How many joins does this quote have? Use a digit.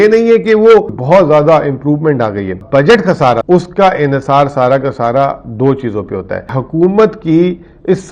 4